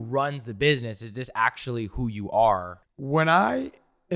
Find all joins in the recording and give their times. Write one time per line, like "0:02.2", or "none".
0:02.7

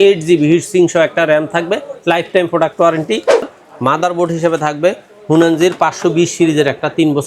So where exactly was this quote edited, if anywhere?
0:03.5

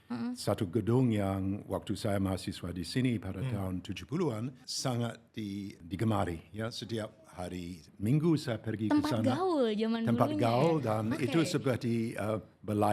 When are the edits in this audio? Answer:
0:04.5
0:05.8

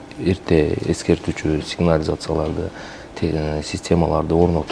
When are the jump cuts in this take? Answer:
none

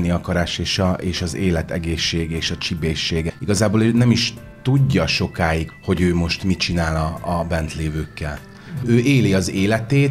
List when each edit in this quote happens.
0:03.3
0:05.7

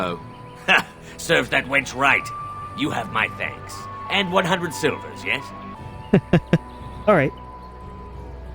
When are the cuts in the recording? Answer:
0:05.8

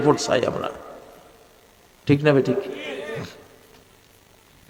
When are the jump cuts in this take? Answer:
none

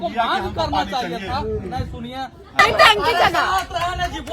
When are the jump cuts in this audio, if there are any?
0:02.6

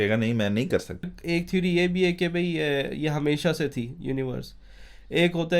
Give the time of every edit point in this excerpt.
0:01.2

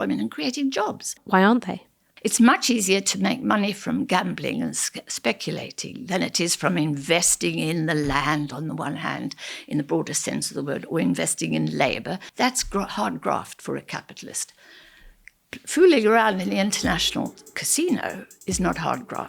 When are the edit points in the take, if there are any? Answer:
0:01.2
0:02.0
0:12.3

